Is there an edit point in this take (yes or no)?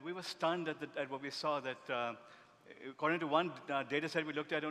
no